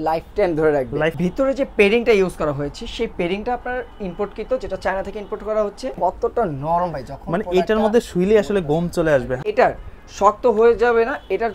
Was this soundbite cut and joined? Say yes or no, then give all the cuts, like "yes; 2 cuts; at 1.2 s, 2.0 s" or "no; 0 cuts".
yes; 3 cuts; at 1.2 s, 5.9 s, 9.4 s